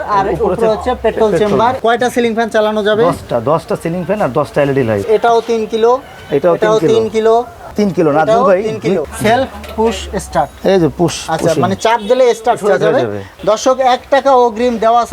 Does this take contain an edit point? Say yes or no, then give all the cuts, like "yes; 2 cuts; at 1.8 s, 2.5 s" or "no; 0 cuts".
yes; 4 cuts; at 1.8 s, 5.1 s, 9.0 s, 13.3 s